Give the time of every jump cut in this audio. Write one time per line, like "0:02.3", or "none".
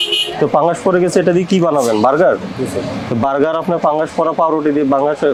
none